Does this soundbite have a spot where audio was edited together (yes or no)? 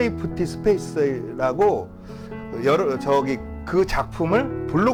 no